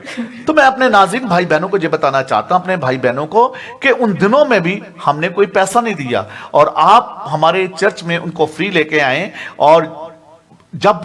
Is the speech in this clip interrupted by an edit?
no; 0 cuts

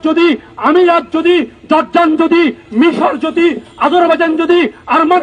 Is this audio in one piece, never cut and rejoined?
yes; 0 cuts

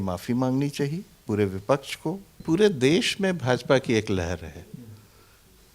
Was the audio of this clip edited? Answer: yes; 1 cut; at 2.4 s

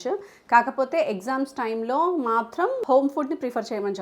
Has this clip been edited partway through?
yes; 1 cut; at 2.8 s

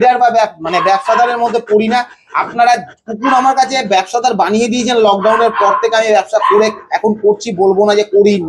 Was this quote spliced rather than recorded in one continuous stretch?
no; 0 cuts

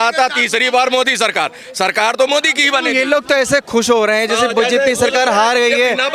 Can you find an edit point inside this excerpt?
no; 0 cuts

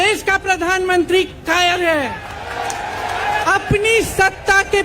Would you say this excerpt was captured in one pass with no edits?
no; 1 cut; at 3.5 s

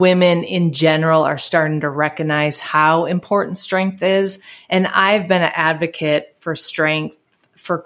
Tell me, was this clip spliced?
no; 0 cuts

